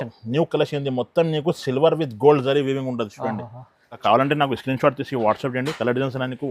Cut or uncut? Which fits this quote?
cut